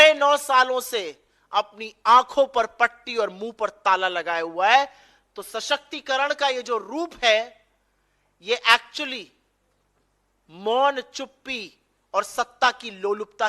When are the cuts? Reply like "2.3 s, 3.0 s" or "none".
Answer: none